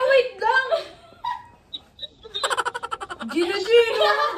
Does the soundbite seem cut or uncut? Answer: cut